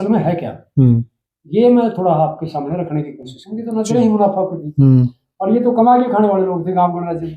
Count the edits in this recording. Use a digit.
1